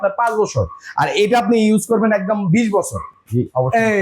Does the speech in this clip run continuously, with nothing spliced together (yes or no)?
no